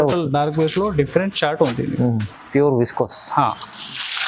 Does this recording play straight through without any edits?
no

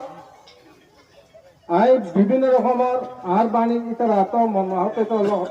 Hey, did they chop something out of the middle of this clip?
yes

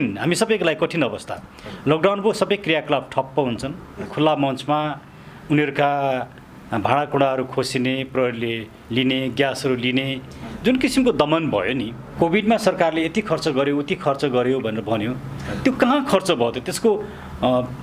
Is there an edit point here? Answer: yes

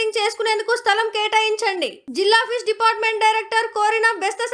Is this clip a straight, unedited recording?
yes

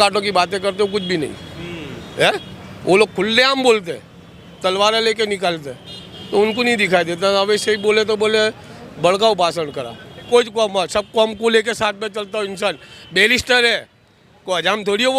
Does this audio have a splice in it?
yes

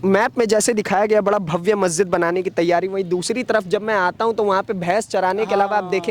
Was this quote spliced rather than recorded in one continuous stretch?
no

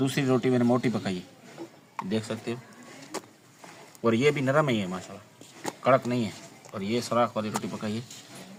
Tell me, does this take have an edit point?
no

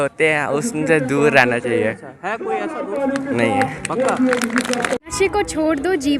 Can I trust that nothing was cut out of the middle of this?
no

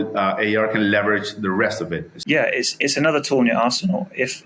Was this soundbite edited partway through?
yes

